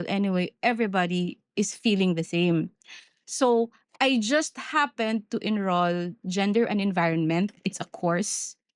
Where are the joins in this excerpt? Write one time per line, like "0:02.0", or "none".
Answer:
none